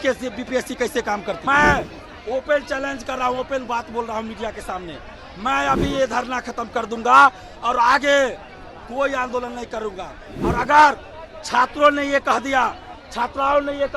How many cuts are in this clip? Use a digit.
1